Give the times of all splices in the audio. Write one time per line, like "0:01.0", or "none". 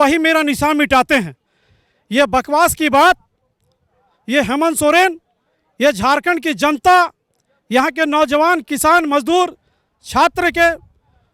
none